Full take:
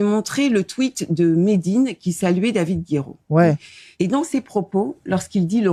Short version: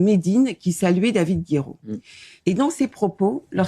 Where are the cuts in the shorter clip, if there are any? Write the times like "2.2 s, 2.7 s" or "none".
2.0 s